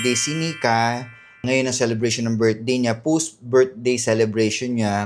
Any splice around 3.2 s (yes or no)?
no